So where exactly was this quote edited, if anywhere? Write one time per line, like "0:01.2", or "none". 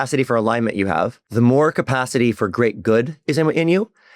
0:01.2